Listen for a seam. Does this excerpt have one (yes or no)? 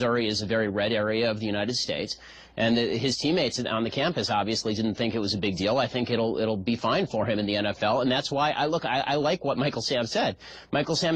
yes